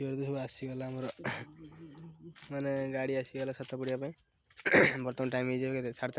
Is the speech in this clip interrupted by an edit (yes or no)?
no